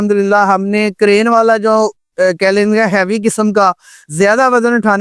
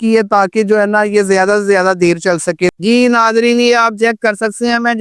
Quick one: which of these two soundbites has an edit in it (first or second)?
second